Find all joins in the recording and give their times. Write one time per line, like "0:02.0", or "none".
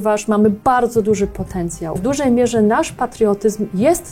0:02.0